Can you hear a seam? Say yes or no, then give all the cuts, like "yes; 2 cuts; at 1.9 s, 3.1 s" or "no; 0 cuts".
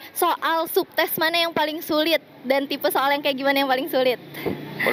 no; 0 cuts